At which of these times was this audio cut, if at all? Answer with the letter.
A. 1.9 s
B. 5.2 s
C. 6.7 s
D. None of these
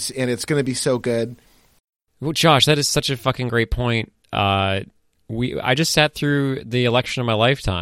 A